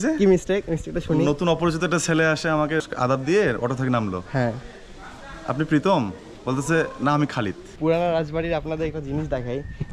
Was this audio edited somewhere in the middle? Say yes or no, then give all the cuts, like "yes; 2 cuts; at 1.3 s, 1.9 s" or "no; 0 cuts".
yes; 2 cuts; at 2.8 s, 7.6 s